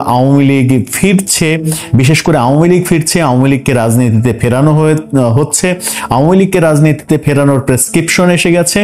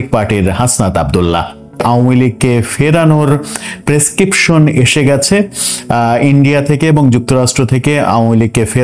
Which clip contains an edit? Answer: second; 1 cut; at 1.8 s

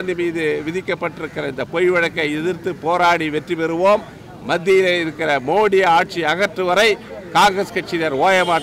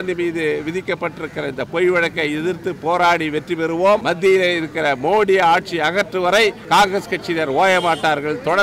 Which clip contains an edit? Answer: second; 2 cuts; at 4.0 s, 6.6 s

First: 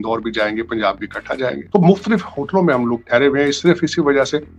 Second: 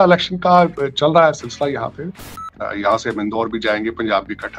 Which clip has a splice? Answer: second; 1 cut; at 2.2 s

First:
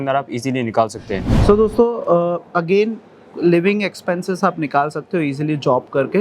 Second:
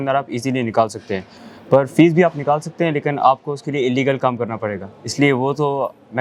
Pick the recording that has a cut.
first; 1 cut; at 1.3 s

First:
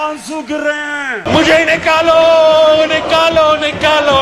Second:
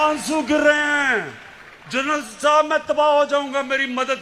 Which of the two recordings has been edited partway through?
first; 1 cut; at 1.2 s

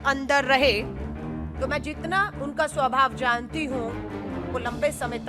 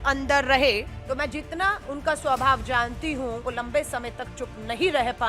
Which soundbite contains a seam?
second; 2 cuts; at 0.9 s, 3.4 s

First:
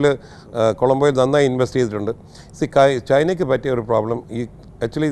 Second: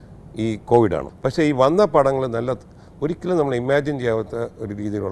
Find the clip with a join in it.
second; 1 cut; at 1.1 s

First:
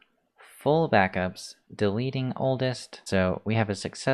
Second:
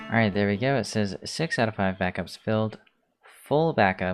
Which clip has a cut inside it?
first; 1 cut; at 3.0 s

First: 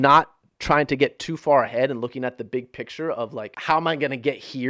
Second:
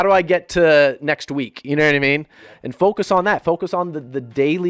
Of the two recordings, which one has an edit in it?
first; 1 cut; at 3.5 s

